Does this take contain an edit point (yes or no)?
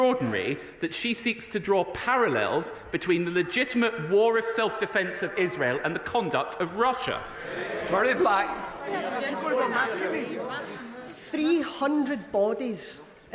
yes